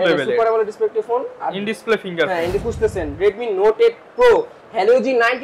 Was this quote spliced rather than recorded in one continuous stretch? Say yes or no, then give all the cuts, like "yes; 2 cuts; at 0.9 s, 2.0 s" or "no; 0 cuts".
yes; 1 cut; at 2.6 s